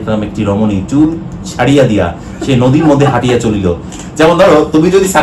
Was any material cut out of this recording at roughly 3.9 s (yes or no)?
yes